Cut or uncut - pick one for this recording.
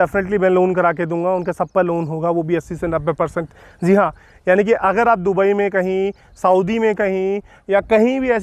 uncut